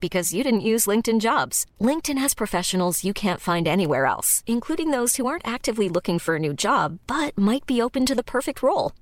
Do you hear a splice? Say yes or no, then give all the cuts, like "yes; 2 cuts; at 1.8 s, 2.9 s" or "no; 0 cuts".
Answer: no; 0 cuts